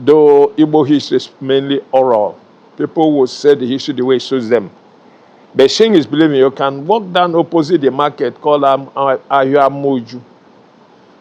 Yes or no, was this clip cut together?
no